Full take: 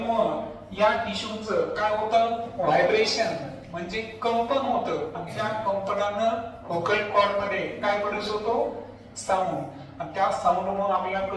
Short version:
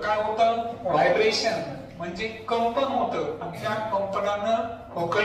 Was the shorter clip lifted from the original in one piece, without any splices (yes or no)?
yes